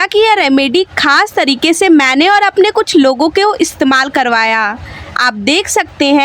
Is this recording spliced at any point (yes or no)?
no